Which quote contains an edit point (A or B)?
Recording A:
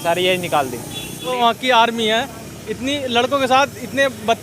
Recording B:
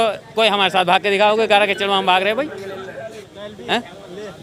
A